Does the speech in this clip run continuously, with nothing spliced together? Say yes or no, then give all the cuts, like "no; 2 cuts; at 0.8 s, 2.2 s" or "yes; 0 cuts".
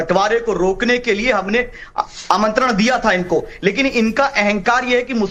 yes; 0 cuts